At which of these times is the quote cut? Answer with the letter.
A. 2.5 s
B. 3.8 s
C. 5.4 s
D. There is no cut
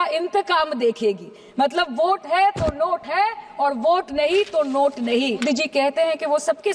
C